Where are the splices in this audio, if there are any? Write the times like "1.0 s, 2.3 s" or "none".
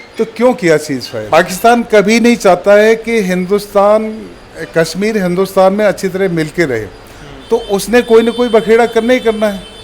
1.1 s